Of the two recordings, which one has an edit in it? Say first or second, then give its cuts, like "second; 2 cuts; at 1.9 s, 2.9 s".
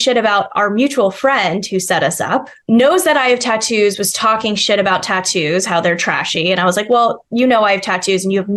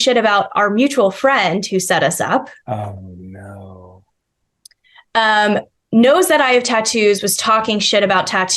first; 1 cut; at 2.5 s